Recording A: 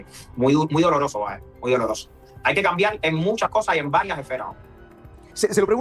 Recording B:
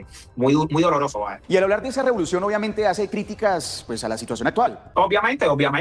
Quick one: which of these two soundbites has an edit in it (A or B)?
B